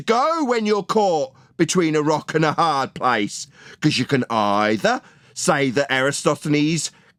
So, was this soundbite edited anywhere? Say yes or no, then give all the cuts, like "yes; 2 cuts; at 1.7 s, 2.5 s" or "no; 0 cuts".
no; 0 cuts